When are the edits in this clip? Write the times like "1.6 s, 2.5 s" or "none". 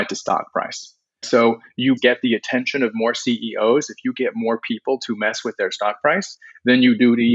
1.2 s, 2.0 s